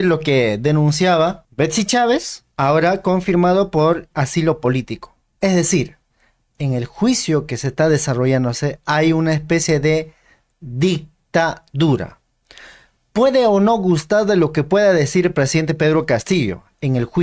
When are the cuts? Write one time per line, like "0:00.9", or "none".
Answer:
0:01.4
0:02.4